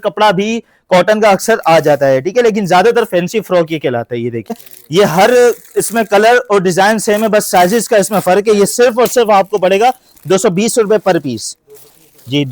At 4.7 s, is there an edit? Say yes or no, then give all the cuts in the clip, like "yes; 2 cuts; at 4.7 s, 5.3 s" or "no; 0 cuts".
yes; 1 cut; at 4.7 s